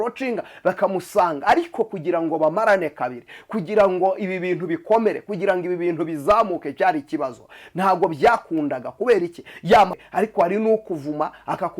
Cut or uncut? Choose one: cut